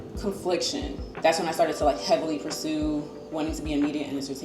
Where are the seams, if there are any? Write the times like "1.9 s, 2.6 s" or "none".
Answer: 1.0 s

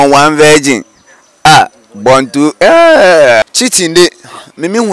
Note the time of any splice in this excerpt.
3.4 s

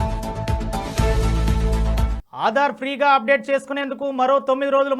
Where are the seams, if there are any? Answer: none

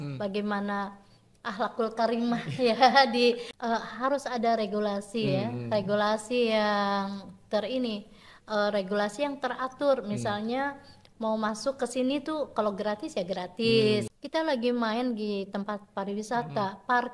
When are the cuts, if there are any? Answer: 3.5 s, 14.2 s

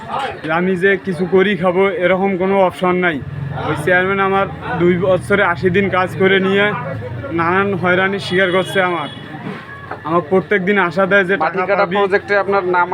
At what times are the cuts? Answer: none

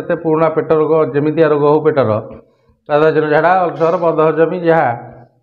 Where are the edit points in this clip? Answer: none

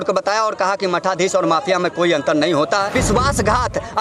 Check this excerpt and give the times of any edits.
2.9 s

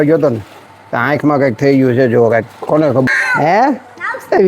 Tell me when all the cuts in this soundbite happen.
3.1 s

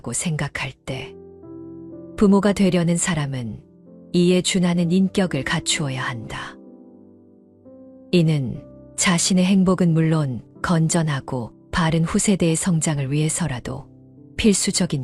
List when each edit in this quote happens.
0.9 s, 2.2 s

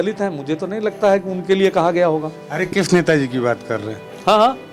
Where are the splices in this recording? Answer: none

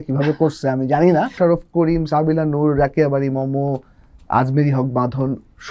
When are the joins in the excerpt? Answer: 1.3 s

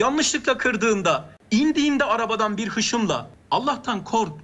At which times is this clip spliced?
1.3 s, 3.3 s

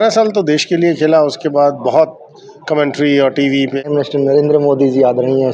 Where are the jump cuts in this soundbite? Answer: 3.8 s

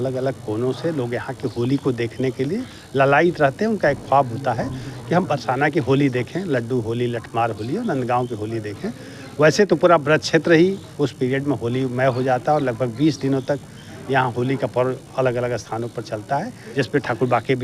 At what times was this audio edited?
16.6 s

